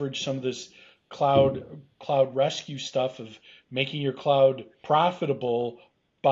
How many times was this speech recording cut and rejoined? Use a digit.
1